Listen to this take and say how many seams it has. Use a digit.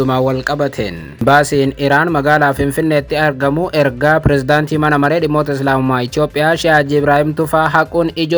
1